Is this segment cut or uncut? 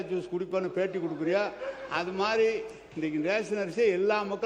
uncut